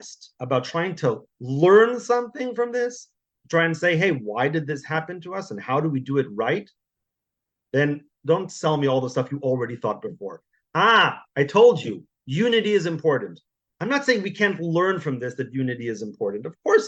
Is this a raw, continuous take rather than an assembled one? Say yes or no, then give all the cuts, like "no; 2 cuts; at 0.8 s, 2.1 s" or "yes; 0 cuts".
yes; 0 cuts